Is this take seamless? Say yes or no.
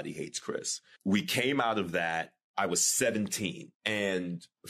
no